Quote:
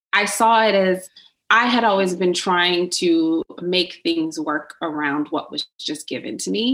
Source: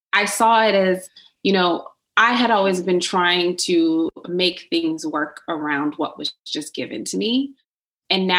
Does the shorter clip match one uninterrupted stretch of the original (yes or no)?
no